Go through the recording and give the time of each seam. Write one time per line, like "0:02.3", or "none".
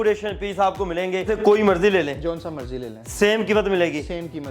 0:01.3